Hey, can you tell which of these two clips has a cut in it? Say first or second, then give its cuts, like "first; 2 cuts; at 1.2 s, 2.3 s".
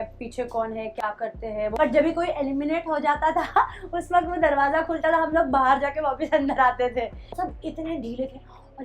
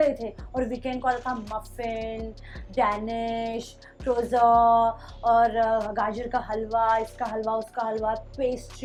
first; 2 cuts; at 1.7 s, 7.3 s